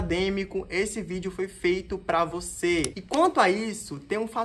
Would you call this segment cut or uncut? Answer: cut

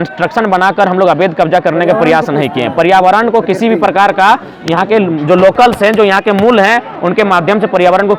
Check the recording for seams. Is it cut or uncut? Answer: uncut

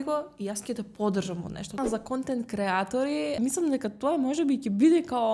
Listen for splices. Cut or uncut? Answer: cut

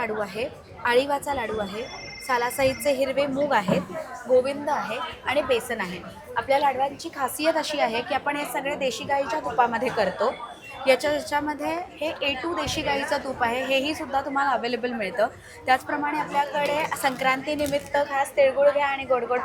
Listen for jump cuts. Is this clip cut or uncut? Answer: uncut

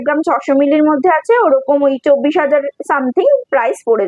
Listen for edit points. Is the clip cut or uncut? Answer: uncut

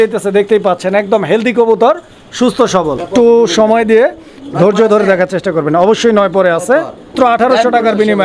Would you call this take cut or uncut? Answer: cut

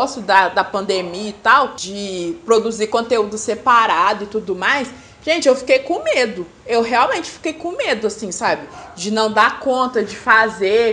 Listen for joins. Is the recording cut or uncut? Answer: cut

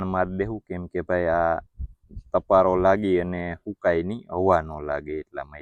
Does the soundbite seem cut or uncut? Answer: uncut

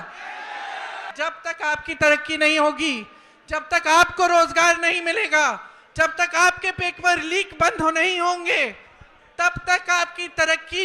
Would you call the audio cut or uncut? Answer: cut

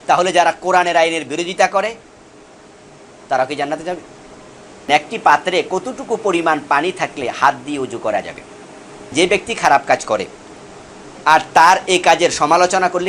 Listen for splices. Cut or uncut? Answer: cut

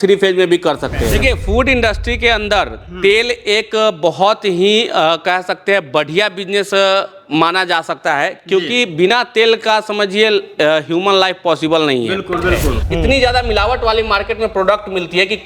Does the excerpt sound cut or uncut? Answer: cut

